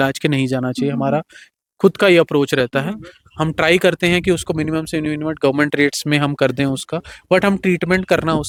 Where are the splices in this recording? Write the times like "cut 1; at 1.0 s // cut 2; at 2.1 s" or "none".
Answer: none